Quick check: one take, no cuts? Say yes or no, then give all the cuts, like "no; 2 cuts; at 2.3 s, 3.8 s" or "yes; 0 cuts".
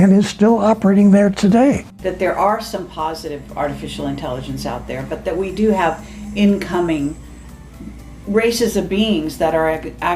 no; 1 cut; at 1.9 s